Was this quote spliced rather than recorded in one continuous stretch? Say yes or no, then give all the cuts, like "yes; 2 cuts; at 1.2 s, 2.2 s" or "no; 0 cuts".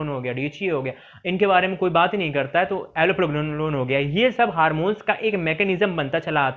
no; 0 cuts